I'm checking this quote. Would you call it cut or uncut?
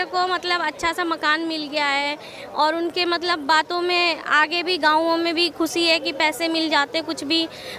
uncut